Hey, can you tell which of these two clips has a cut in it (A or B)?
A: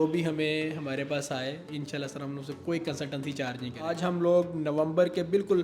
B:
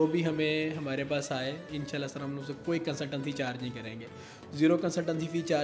A